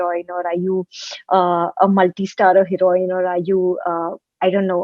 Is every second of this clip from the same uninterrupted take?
yes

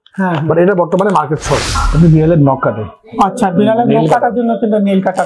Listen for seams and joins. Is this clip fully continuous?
no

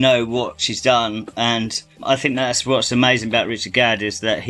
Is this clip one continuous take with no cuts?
yes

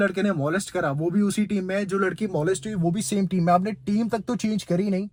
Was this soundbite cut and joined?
no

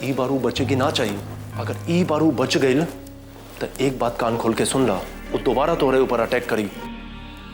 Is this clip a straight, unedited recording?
yes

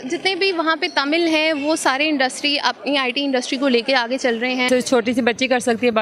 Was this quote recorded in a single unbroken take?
no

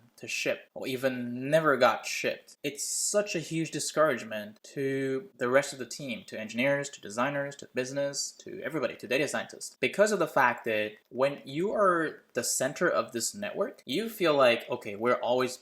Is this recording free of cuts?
no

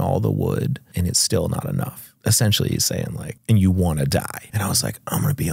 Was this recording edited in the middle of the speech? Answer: yes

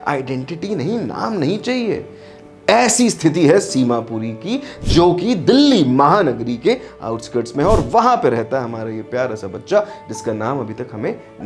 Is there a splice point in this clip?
no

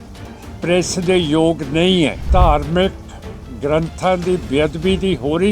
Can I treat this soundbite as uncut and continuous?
no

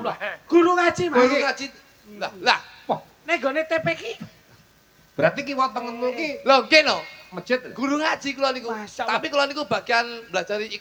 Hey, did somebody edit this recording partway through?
no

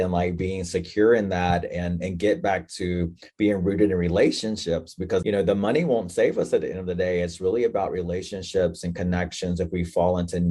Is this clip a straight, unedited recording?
no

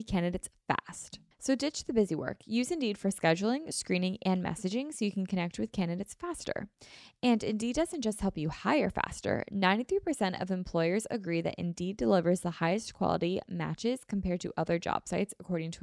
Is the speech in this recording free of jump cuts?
yes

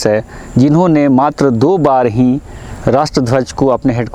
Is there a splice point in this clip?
no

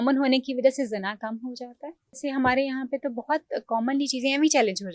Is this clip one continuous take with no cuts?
no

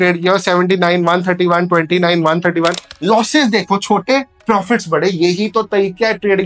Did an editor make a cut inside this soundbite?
no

